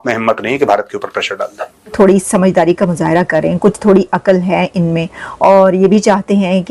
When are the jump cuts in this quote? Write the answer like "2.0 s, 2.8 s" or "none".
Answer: 1.9 s